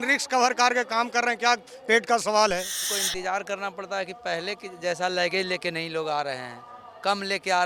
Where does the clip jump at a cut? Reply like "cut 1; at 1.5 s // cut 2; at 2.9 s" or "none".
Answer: cut 1; at 2.9 s

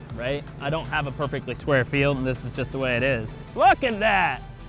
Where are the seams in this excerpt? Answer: cut 1; at 3.4 s

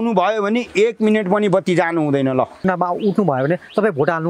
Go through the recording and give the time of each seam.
cut 1; at 2.7 s

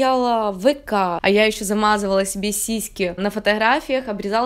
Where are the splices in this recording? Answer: cut 1; at 1.2 s

